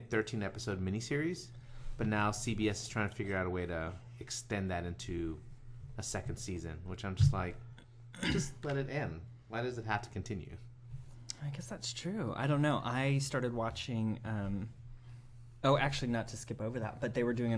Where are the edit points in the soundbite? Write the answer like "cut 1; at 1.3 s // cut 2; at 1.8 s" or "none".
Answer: none